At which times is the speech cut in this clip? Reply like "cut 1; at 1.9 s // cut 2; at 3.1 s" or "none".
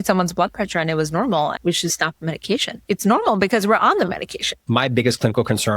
cut 1; at 1.5 s // cut 2; at 2.7 s // cut 3; at 4.6 s